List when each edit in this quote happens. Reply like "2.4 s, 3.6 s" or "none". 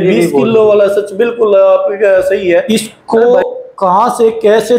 2.7 s